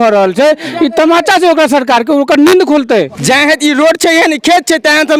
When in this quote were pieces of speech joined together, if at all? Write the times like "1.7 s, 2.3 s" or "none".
3.2 s